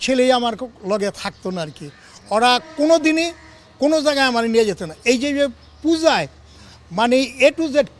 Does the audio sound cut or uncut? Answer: uncut